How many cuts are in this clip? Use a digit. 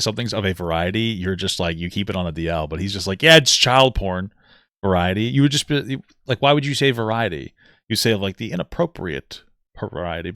0